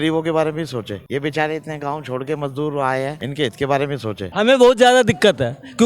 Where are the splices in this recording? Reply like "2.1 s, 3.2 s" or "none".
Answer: 4.2 s